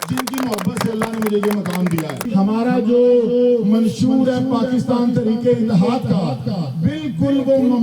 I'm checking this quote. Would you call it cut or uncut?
cut